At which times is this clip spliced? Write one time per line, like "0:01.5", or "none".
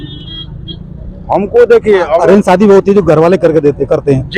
none